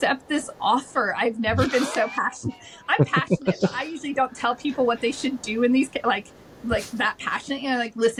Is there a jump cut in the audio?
no; 0 cuts

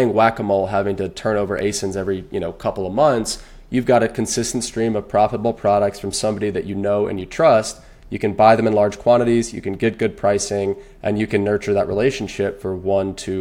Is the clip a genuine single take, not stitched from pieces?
yes; 0 cuts

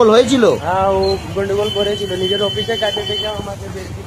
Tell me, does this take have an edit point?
no; 0 cuts

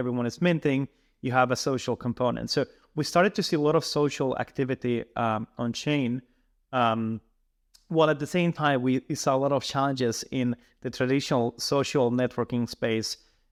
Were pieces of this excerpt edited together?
no; 0 cuts

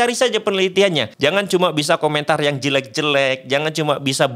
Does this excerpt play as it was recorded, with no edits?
no; 1 cut; at 1.1 s

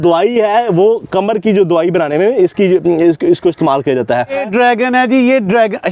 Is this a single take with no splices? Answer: no; 1 cut; at 4.4 s

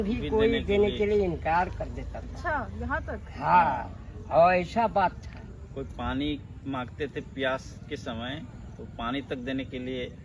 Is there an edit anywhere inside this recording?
no; 0 cuts

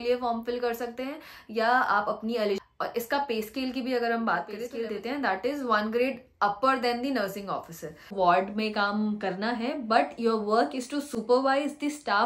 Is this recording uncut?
no; 3 cuts; at 2.6 s, 4.6 s, 8.1 s

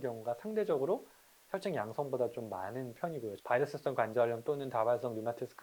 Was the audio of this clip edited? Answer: yes; 1 cut; at 3.3 s

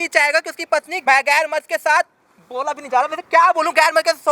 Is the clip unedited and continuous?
no; 1 cut; at 1.0 s

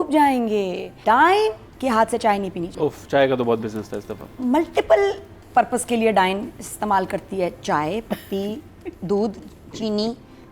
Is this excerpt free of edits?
no; 3 cuts; at 0.9 s, 1.7 s, 2.7 s

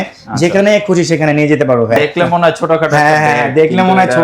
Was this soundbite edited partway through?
yes; 1 cut; at 2.0 s

